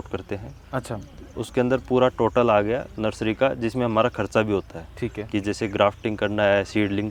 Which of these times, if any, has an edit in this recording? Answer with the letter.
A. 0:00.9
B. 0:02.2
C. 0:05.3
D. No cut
D